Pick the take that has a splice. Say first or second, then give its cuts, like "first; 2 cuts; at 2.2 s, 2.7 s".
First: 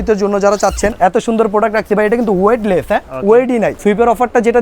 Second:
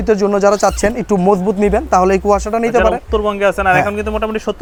first; 2 cuts; at 0.9 s, 3.8 s